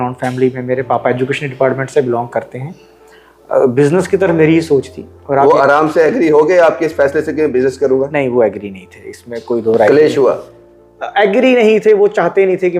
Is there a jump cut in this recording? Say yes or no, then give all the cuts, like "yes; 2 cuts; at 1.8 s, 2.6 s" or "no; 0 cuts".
no; 0 cuts